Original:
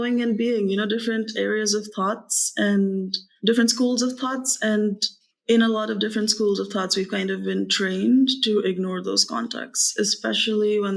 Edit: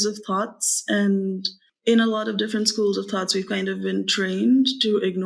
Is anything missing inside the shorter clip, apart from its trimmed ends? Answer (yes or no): yes